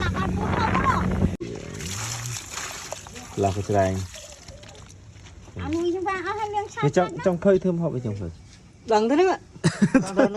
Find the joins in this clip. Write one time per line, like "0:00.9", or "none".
0:01.4